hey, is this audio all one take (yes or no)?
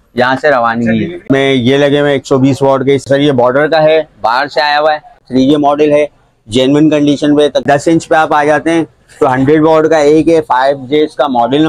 no